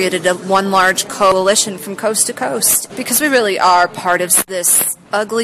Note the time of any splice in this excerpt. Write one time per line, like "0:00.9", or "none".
0:01.3
0:02.8
0:04.5

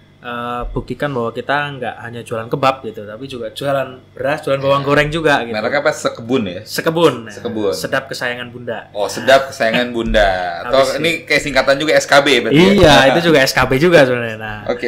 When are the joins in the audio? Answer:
none

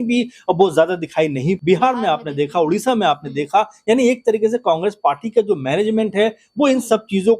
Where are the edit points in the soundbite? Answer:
0:01.6

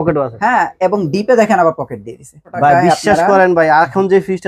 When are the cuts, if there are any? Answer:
0:02.4

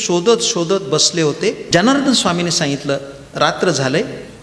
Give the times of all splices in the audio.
0:01.6

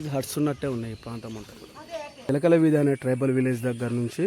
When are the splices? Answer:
0:02.3

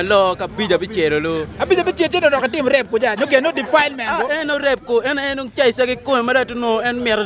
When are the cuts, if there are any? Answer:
none

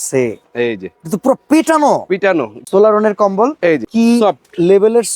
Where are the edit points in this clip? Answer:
0:02.7
0:03.9

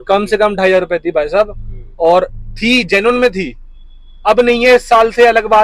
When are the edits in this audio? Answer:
none

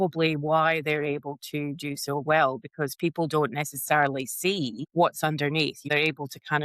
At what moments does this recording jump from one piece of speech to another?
0:04.8
0:05.9

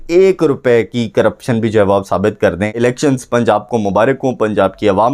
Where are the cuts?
0:02.8

